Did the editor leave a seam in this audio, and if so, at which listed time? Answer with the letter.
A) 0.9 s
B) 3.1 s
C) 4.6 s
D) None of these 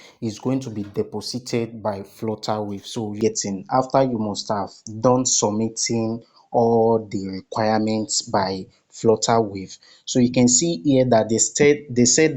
B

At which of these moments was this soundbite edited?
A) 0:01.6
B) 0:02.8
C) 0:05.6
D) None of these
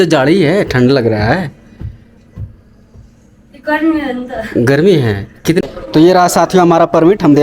C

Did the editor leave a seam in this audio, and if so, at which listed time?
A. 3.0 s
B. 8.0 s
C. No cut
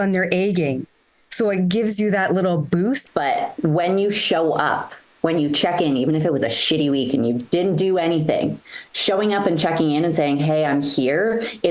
A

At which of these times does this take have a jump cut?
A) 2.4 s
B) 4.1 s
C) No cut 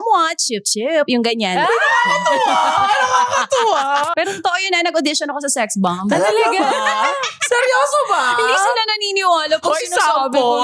B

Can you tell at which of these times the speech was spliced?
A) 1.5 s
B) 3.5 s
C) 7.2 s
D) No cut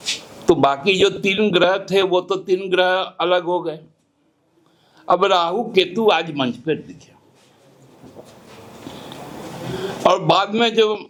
D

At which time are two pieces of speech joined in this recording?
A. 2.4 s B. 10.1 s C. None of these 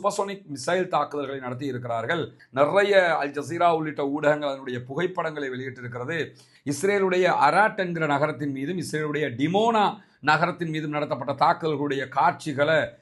A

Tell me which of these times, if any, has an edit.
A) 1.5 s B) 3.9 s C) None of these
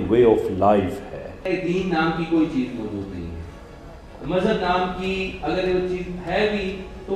A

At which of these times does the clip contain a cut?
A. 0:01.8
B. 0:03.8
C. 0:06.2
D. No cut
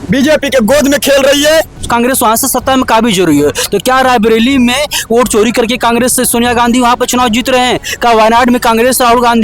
A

